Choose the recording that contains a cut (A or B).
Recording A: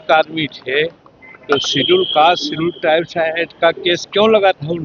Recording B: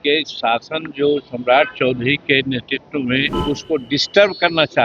B